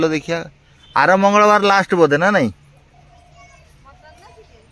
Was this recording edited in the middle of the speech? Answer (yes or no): no